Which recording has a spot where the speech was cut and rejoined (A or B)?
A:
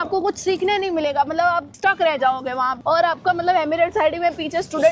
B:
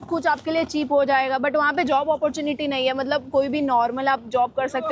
A